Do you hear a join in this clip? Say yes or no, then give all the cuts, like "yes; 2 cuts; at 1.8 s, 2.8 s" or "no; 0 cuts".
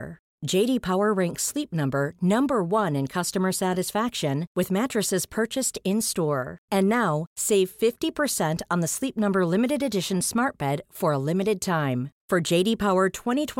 no; 0 cuts